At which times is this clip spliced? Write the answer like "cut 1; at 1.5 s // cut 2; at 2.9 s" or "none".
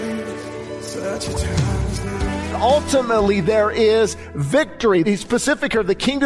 cut 1; at 2.6 s // cut 2; at 5.0 s